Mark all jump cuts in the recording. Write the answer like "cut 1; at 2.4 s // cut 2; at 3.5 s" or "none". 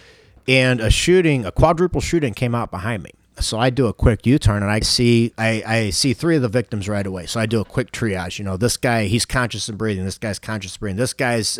cut 1; at 4.9 s